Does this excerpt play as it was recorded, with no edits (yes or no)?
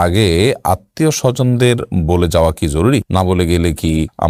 yes